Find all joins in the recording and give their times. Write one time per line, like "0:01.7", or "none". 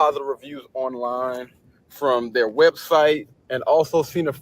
0:03.0